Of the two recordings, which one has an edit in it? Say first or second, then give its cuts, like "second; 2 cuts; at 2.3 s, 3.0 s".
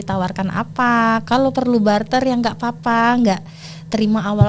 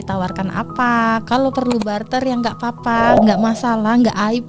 second; 1 cut; at 3.2 s